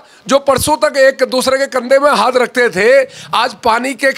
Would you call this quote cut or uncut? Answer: uncut